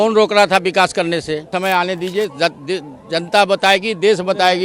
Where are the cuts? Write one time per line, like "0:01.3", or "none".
0:01.5